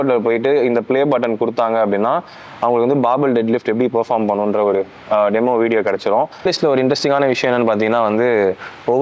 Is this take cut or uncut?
cut